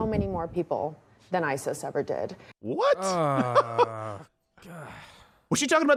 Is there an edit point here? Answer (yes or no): no